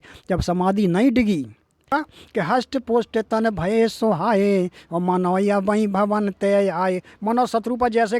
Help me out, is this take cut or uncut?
cut